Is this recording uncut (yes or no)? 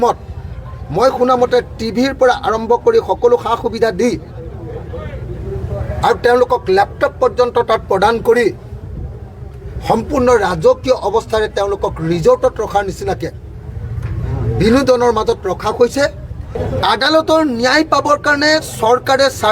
no